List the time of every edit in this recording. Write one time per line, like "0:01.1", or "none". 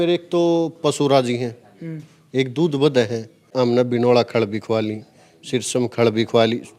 0:03.4